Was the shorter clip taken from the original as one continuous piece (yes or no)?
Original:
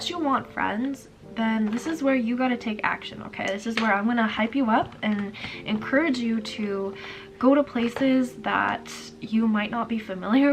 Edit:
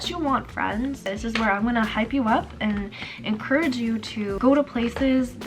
no